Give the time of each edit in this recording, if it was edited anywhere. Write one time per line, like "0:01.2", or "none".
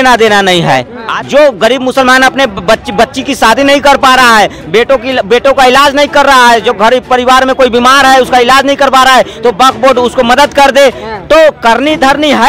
0:01.0